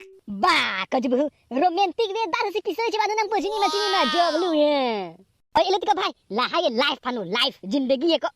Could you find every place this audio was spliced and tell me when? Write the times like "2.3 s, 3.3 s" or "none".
5.6 s